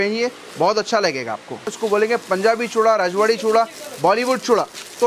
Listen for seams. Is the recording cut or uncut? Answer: cut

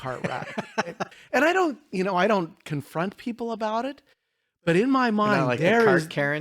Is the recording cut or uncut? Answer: cut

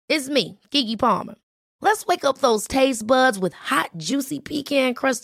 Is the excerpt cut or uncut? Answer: uncut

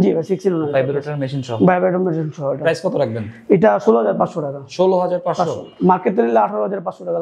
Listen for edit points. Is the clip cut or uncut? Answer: uncut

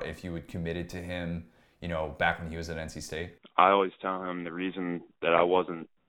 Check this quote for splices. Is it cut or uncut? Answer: cut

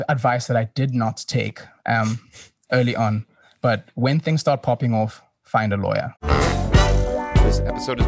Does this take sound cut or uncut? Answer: cut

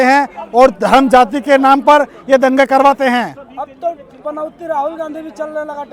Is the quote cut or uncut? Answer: uncut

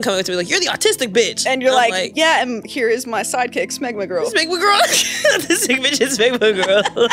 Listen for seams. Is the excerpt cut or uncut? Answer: uncut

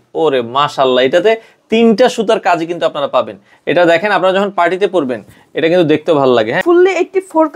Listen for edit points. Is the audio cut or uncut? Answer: cut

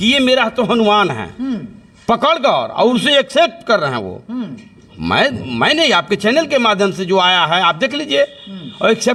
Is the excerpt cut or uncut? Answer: uncut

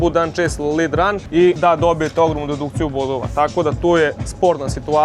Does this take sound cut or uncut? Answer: uncut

